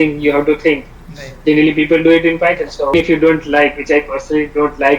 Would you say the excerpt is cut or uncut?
cut